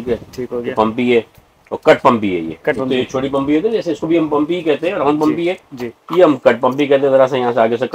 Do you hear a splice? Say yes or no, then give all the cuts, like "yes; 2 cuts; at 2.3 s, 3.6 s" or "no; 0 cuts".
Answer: no; 0 cuts